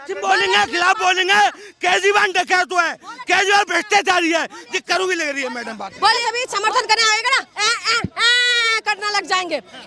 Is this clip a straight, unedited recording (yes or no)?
no